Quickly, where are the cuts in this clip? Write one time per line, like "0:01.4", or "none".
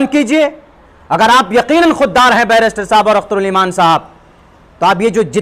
none